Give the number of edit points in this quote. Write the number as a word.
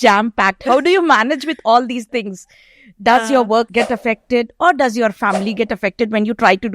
one